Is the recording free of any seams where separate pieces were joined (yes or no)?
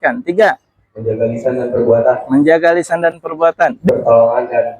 no